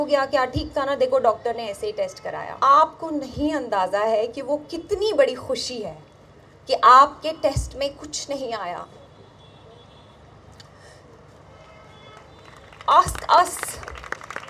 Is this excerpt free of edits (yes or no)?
no